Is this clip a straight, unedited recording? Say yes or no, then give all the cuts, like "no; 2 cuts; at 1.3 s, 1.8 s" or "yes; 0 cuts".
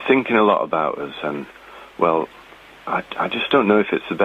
yes; 0 cuts